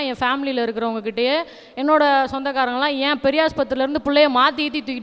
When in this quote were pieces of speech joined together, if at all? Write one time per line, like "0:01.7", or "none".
none